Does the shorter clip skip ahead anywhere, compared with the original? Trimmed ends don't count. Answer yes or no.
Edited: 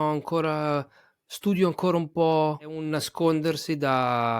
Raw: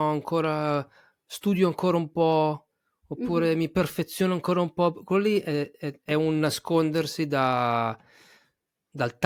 yes